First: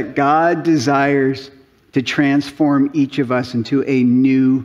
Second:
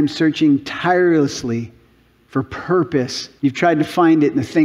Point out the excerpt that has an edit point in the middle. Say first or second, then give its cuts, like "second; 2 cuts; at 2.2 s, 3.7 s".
second; 1 cut; at 3.2 s